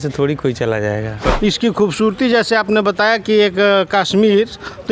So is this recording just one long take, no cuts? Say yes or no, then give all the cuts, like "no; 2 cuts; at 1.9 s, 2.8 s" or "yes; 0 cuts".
no; 1 cut; at 1.2 s